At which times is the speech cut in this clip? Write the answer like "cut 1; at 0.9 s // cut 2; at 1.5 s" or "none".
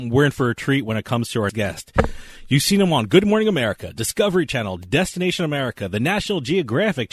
cut 1; at 1.5 s